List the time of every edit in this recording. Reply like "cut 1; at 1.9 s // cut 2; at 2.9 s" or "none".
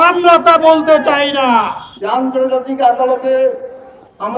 cut 1; at 1.8 s